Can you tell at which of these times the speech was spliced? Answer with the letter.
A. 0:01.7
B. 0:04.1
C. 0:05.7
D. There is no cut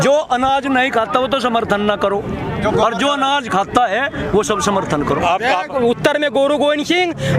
C